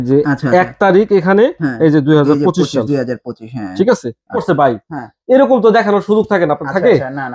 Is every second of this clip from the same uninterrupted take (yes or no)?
no